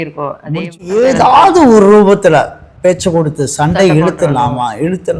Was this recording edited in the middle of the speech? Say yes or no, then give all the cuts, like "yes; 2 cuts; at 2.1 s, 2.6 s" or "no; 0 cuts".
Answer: yes; 1 cut; at 1.0 s